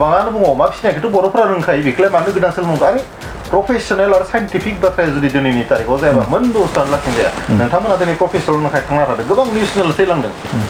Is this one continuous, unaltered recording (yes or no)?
yes